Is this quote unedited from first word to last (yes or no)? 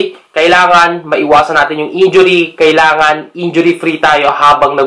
yes